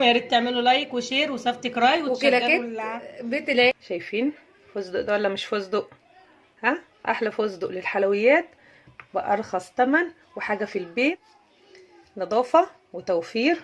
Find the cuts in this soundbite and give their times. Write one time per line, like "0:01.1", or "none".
0:03.8